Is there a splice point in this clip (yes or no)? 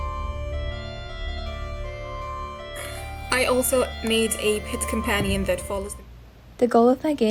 yes